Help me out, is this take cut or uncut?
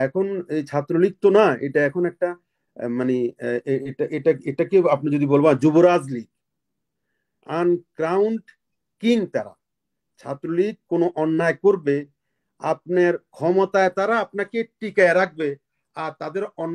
uncut